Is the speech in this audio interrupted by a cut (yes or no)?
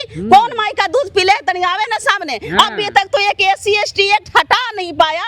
no